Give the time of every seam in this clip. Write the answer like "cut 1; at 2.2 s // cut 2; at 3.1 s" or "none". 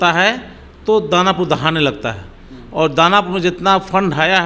none

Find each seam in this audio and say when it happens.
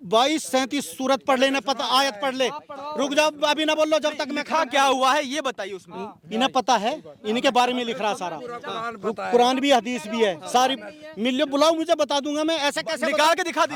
none

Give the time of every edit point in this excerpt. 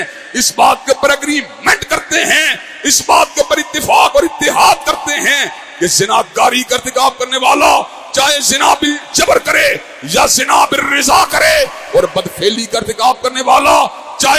none

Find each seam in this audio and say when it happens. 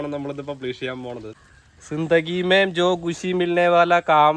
cut 1; at 1.3 s

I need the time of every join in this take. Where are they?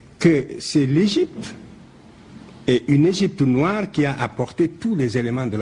none

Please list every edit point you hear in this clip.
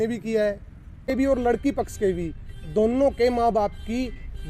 cut 1; at 0.9 s

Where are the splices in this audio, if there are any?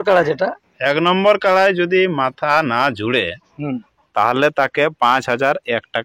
none

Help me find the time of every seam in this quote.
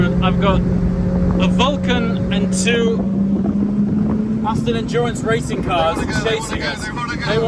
none

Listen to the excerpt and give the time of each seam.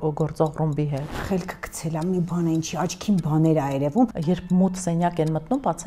cut 1; at 1.1 s // cut 2; at 4.2 s

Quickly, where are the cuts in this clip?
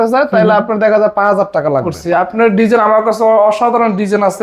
cut 1; at 1.9 s

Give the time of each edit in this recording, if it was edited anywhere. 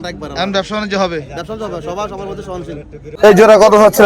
cut 1; at 3.1 s

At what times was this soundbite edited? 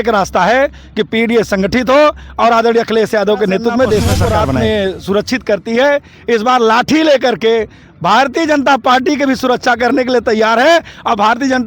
cut 1; at 4.6 s

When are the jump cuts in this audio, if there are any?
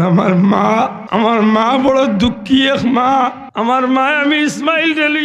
cut 1; at 1.0 s // cut 2; at 3.4 s

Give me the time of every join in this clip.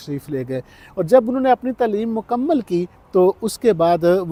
none

